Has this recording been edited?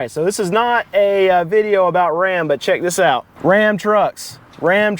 yes; 1 cut; at 3.3 s

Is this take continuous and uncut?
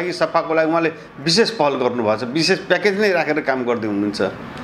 yes; 0 cuts

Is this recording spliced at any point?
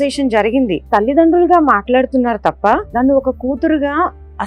yes; 2 cuts; at 0.8 s, 2.9 s

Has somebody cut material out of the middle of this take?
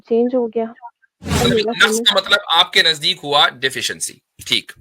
yes; 1 cut; at 1.4 s

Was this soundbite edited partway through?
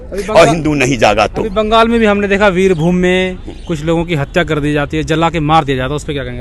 no; 0 cuts

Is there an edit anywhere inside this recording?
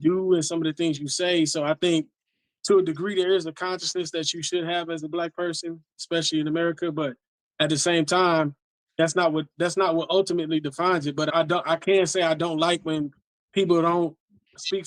no; 0 cuts

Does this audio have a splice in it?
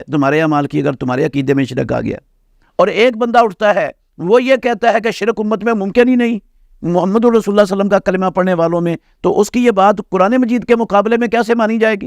yes; 1 cut; at 2.6 s

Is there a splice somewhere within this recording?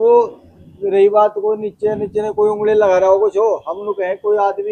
no; 0 cuts

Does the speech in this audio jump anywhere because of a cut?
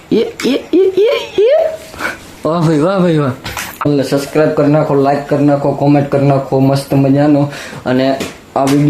yes; 1 cut; at 3.9 s

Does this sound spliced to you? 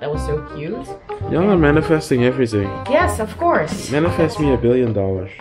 no; 0 cuts

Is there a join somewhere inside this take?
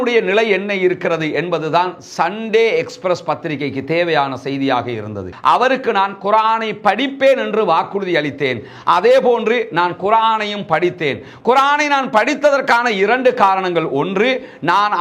yes; 1 cut; at 5.3 s

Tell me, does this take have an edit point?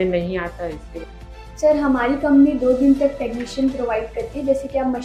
no; 0 cuts

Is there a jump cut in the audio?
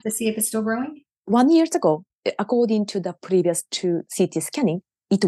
yes; 2 cuts; at 1.1 s, 2.2 s

